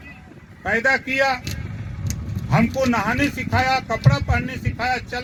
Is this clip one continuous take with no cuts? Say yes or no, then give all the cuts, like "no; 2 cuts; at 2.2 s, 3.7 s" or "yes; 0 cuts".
yes; 0 cuts